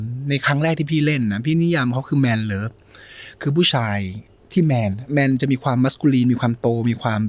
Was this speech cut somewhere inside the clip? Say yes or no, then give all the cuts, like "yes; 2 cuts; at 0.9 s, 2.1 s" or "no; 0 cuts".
no; 0 cuts